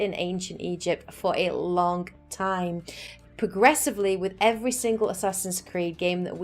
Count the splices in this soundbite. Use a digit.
1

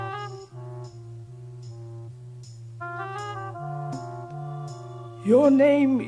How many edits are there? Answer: 0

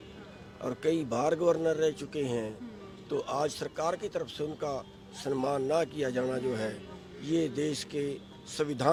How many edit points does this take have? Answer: 0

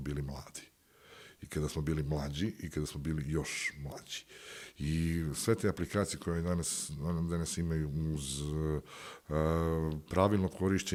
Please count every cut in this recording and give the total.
0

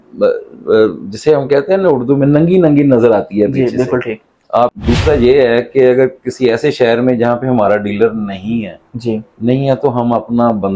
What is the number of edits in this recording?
1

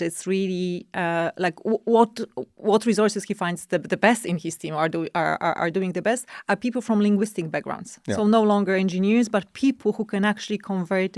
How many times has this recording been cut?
0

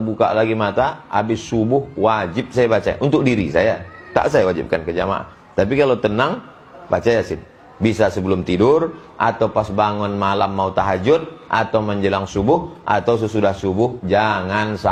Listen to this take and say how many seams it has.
0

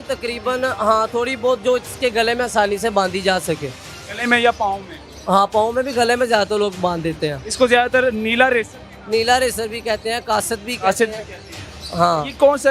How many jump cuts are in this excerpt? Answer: 0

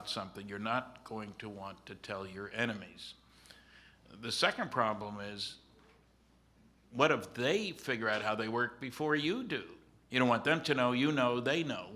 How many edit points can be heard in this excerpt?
1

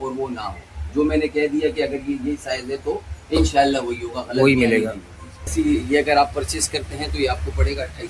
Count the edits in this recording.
1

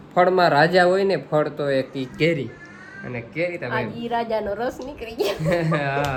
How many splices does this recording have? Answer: 0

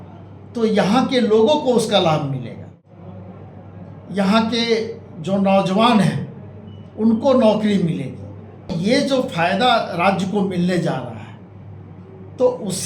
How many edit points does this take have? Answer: 2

